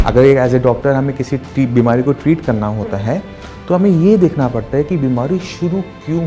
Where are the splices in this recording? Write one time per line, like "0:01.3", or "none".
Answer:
none